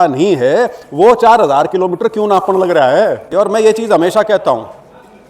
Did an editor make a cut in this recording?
yes; 1 cut; at 3.2 s

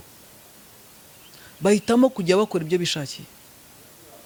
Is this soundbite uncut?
yes; 0 cuts

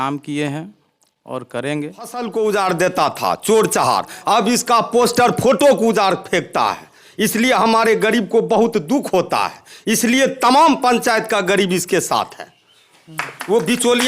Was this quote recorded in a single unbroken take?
no; 1 cut; at 2.2 s

